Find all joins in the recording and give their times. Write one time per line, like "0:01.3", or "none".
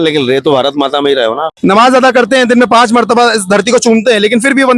0:01.5